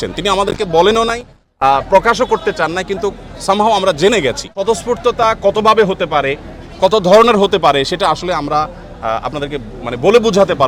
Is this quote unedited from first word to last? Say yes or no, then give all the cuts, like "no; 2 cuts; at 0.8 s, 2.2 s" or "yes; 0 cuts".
no; 1 cut; at 4.6 s